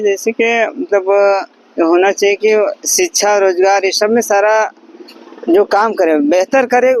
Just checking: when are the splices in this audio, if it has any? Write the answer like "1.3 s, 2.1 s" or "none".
none